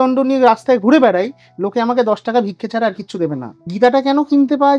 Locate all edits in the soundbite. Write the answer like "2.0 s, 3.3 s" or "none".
3.7 s